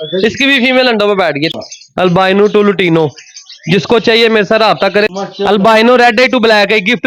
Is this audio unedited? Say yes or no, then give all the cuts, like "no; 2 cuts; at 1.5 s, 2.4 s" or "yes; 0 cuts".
no; 2 cuts; at 1.6 s, 5.1 s